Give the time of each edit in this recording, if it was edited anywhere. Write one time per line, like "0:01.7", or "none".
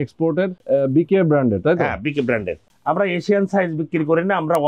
0:02.7